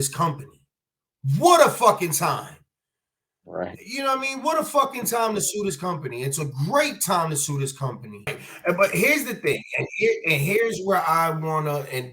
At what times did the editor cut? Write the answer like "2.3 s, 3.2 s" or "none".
8.5 s